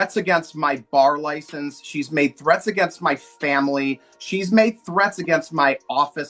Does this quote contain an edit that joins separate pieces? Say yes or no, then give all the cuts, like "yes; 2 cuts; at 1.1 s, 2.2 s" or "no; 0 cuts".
no; 0 cuts